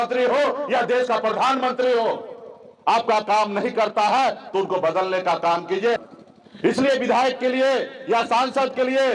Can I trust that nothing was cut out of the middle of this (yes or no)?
no